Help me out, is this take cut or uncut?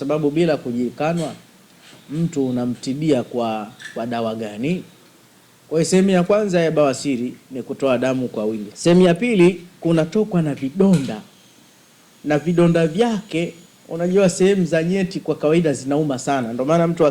cut